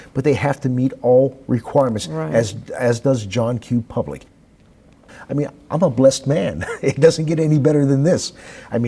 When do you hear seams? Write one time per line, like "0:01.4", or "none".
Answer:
0:04.7